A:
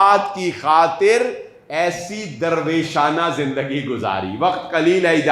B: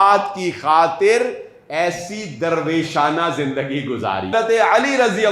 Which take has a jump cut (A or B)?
B